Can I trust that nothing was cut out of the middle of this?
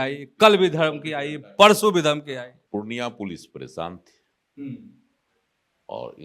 yes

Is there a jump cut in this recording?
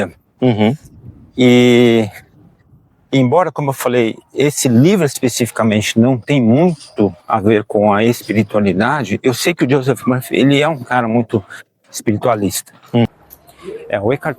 yes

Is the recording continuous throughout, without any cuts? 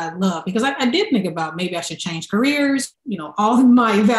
no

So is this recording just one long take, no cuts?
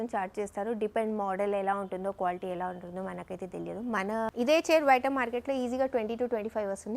no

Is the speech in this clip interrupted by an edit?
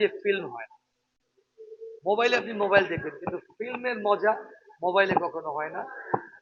no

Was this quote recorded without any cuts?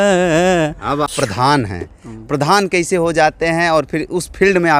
no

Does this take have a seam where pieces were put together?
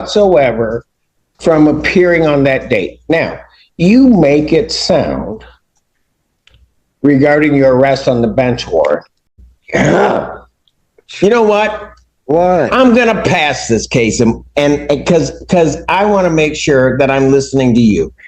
yes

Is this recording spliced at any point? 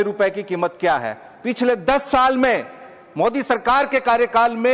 no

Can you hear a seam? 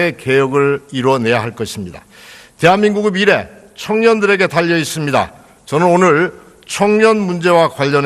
yes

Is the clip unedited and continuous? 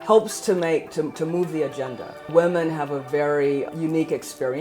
no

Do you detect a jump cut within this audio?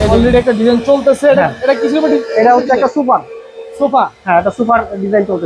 no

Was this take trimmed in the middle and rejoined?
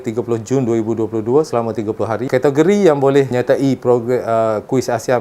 yes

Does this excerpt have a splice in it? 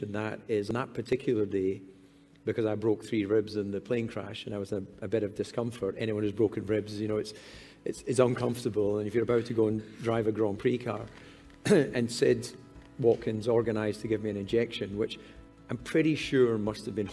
yes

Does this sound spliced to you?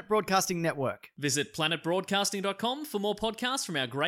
no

